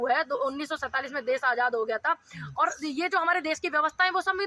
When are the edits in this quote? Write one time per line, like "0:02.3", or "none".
none